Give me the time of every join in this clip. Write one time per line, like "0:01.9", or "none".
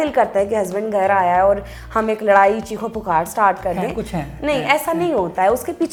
none

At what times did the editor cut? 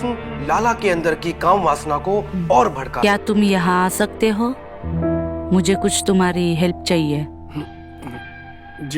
0:02.9

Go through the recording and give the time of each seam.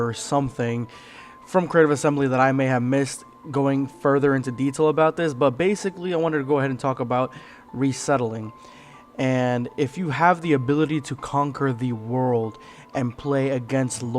0:04.9

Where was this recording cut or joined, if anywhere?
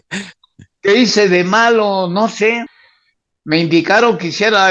0:02.8

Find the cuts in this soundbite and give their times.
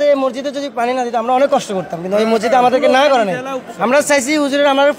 none

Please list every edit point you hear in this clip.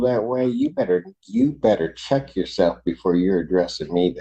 none

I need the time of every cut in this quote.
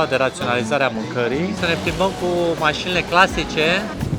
0:01.6

